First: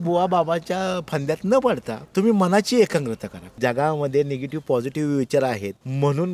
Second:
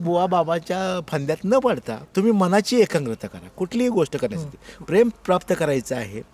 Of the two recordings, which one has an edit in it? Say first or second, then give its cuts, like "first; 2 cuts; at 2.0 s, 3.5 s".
first; 1 cut; at 3.6 s